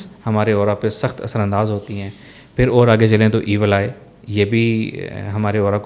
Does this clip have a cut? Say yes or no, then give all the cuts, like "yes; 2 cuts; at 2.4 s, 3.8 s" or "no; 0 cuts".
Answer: no; 0 cuts